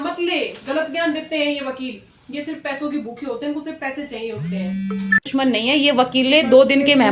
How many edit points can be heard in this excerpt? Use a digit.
1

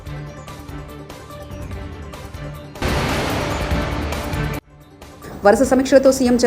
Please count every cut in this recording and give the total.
3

